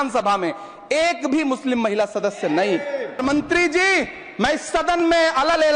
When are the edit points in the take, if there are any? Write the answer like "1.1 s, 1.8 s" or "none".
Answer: 3.2 s